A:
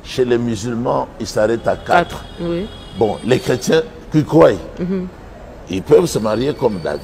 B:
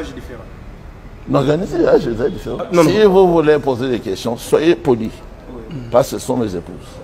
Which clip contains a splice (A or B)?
B